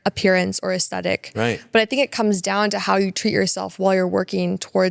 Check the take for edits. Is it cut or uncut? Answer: uncut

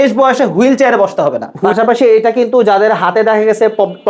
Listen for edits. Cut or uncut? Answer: cut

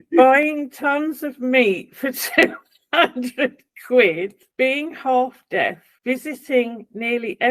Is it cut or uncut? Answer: cut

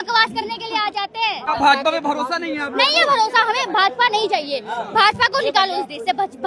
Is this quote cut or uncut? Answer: cut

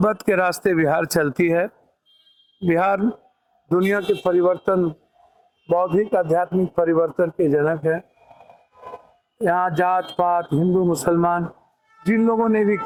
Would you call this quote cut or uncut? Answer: uncut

